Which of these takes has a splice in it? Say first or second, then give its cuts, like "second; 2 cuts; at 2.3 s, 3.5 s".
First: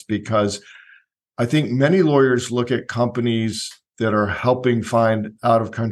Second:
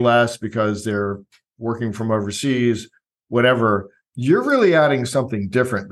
second; 1 cut; at 1.9 s